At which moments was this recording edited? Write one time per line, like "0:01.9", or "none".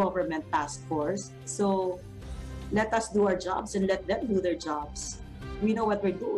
0:01.5